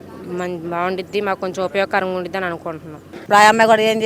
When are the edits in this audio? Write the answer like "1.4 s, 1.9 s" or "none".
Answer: 3.1 s